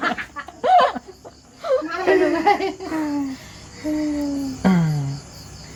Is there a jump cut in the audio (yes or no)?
no